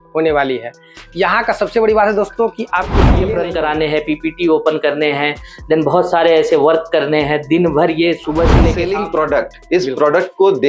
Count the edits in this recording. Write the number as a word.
two